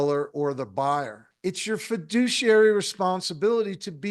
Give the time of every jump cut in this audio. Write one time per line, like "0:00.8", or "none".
0:01.2

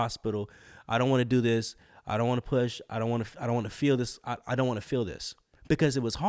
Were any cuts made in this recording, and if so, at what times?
none

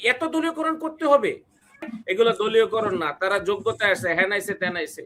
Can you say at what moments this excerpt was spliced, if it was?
0:01.8

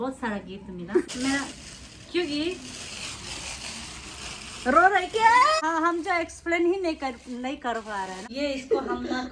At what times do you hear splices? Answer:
0:01.0
0:05.6
0:08.2

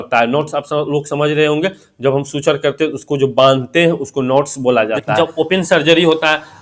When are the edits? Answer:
0:05.1

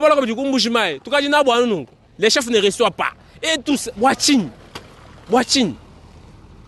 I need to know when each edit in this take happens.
none

